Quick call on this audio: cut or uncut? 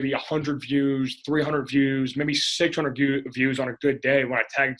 uncut